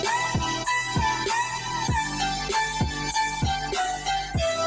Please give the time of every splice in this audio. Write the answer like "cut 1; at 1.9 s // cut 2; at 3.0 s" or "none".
none

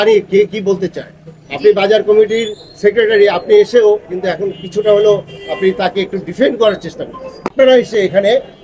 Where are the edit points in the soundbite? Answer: cut 1; at 7.5 s

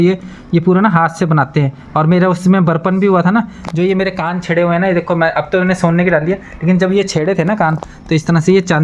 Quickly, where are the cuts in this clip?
none

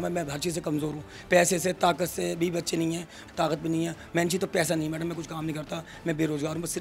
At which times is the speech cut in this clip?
cut 1; at 3.2 s

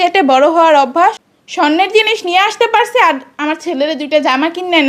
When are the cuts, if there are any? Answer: cut 1; at 1.2 s

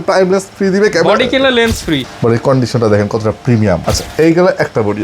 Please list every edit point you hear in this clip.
cut 1; at 2.1 s // cut 2; at 3.8 s

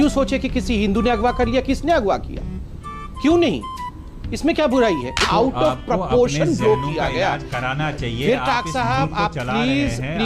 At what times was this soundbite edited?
none

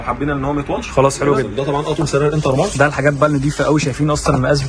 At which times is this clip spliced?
cut 1; at 1.5 s

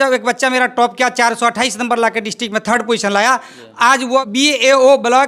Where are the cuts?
cut 1; at 4.3 s

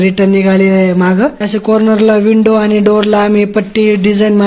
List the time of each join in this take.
cut 1; at 1.4 s

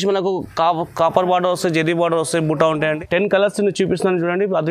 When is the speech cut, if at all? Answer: cut 1; at 2.8 s

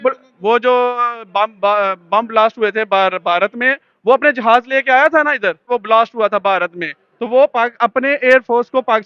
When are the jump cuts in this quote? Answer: cut 1; at 5.7 s

